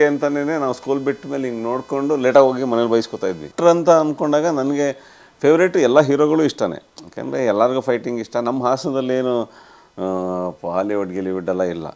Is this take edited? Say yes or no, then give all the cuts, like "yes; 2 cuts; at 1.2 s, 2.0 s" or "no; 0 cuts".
yes; 1 cut; at 3.5 s